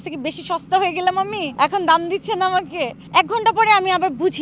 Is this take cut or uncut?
cut